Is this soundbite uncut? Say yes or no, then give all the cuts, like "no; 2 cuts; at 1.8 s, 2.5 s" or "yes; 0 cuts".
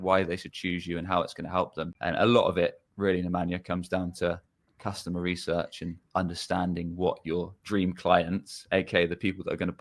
no; 1 cut; at 1.9 s